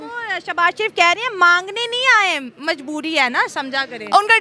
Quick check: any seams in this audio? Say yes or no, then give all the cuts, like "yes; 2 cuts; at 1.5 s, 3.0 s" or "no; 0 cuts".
no; 0 cuts